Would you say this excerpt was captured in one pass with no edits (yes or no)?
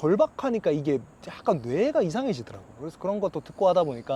yes